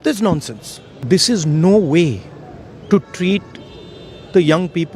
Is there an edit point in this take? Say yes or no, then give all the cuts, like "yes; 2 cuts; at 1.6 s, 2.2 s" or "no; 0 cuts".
yes; 1 cut; at 0.9 s